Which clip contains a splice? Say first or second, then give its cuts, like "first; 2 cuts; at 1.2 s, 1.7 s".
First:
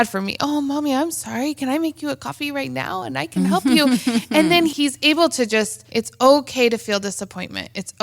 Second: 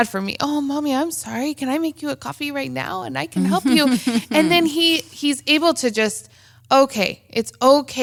first; 2 cuts; at 4.7 s, 5.8 s